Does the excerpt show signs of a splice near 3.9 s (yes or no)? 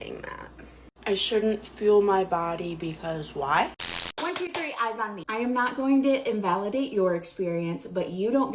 yes